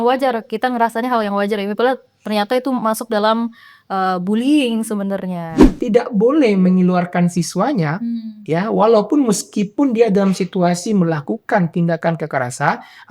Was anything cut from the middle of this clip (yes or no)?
yes